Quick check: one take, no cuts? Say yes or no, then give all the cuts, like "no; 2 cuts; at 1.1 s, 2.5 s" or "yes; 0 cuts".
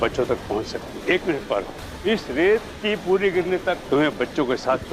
no; 3 cuts; at 0.9 s, 1.8 s, 3.8 s